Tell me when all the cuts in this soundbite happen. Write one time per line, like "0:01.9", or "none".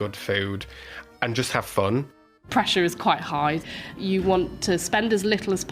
0:02.4
0:03.9